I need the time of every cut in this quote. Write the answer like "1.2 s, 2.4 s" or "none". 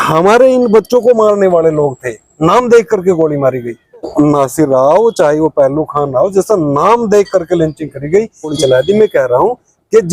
4.1 s, 8.5 s